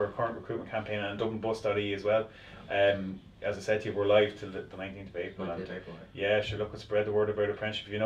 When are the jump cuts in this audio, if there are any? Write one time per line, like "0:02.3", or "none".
none

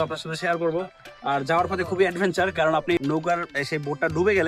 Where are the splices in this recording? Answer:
0:03.0

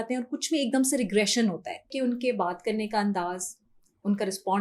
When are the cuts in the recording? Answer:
0:01.9

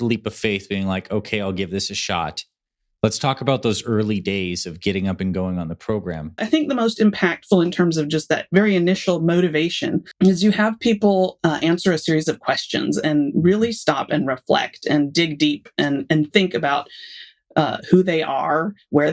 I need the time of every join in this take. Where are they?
0:06.4
0:10.1

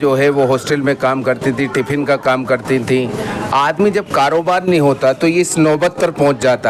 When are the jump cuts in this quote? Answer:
none

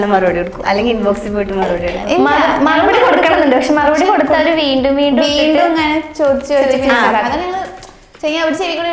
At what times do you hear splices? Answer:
none

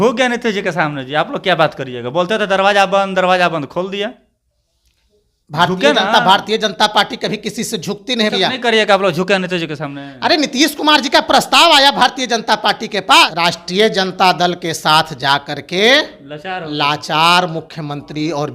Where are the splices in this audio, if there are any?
0:08.3
0:13.3

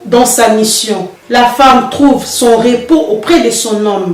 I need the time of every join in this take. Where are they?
0:01.2

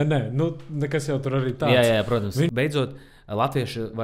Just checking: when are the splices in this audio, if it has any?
0:02.5

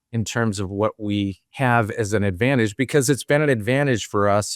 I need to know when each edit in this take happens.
0:01.4

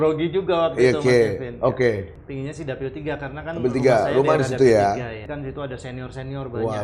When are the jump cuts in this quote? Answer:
0:02.2
0:05.2

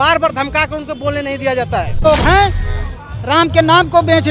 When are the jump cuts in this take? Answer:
0:02.1

